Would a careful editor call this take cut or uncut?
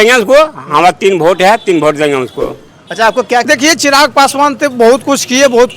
cut